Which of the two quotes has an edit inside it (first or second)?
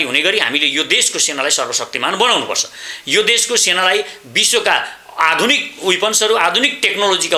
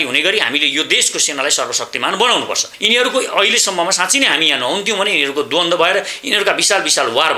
second